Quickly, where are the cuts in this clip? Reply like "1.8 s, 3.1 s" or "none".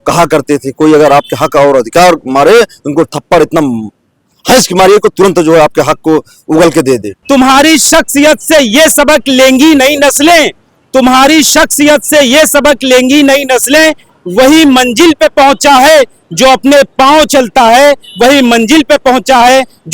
7.1 s